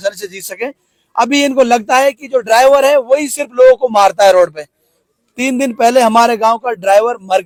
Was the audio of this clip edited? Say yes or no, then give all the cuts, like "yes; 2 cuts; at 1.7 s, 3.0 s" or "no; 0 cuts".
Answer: no; 0 cuts